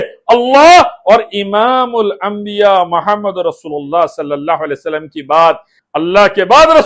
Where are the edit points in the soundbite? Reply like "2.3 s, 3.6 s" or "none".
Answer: 5.7 s